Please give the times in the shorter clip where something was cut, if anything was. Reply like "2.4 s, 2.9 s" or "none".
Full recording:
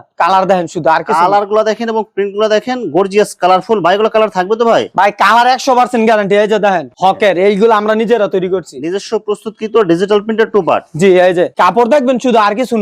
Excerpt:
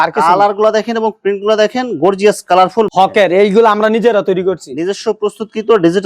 2.9 s